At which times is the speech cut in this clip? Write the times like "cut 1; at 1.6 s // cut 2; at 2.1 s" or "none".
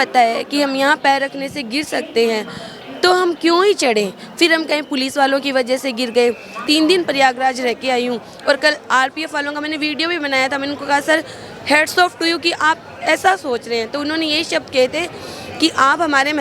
cut 1; at 6.6 s